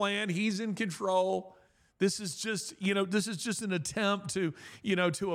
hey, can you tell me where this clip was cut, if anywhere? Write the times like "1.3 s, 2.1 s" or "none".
none